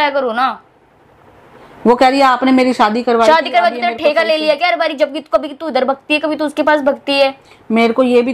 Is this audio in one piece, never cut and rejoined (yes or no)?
yes